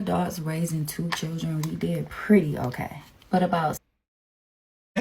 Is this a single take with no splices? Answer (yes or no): yes